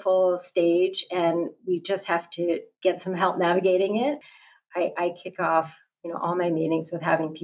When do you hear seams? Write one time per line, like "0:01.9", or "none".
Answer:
0:02.7
0:04.2